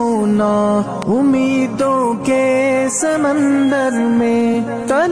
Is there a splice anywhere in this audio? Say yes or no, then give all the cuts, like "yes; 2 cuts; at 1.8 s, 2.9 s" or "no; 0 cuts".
no; 0 cuts